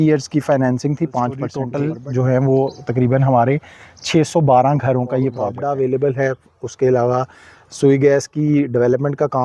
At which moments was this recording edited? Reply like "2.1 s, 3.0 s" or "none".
1.6 s, 5.5 s